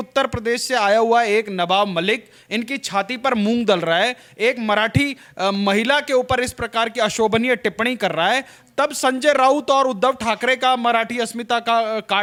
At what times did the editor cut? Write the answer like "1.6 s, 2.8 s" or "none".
none